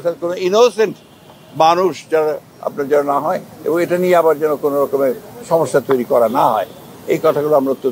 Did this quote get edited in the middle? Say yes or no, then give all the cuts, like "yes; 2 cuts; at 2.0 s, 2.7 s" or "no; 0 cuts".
no; 0 cuts